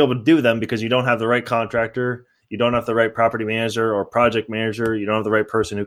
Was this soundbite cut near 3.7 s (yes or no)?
no